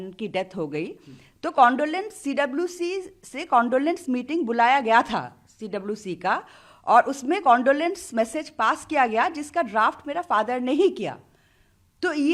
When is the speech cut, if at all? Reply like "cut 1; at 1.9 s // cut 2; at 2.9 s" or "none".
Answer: none